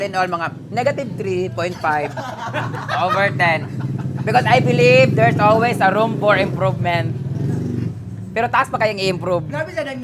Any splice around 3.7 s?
no; 0 cuts

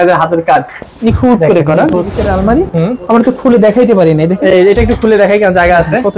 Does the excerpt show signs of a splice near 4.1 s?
no; 1 cut; at 2.2 s

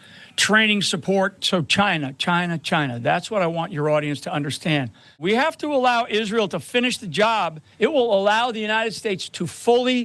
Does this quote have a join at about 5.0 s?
yes; 3 cuts; at 1.4 s, 5.0 s, 7.6 s

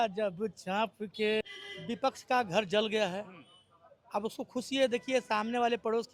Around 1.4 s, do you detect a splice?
yes; 1 cut; at 1.4 s

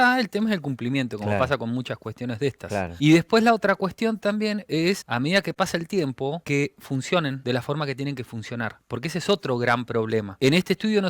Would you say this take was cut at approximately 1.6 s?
no; 5 cuts; at 2.9 s, 5.1 s, 6.4 s, 7.4 s, 10.4 s

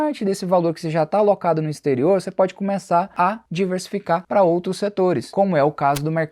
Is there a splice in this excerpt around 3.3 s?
no; 1 cut; at 5.3 s

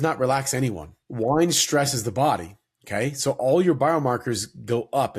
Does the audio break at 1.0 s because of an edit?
yes; 1 cut; at 1.0 s

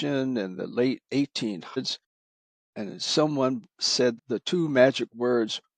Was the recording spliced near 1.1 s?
no; 1 cut; at 4.1 s

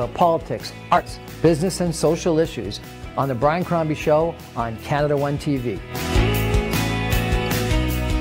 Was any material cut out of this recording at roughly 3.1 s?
no; 1 cut; at 1.0 s

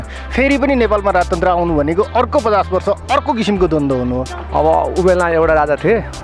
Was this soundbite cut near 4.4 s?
yes; 1 cut; at 4.4 s

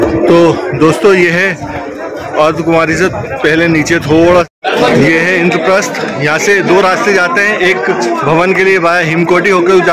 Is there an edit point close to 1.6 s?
no; 1 cut; at 4.5 s

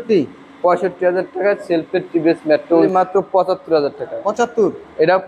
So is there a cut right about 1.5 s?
no; 1 cut; at 2.9 s

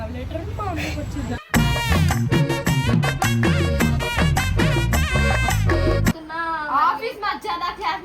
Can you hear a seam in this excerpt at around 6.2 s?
yes; 1 cut; at 6.2 s

